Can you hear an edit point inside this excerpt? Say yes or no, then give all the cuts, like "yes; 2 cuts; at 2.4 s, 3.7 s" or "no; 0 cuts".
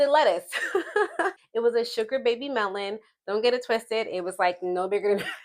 yes; 1 cut; at 1.4 s